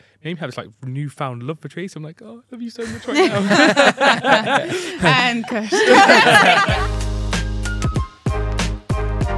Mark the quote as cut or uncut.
cut